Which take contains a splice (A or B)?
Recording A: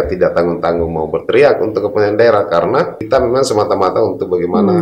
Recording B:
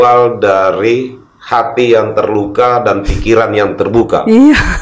A